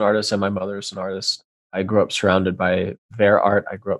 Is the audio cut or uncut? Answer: cut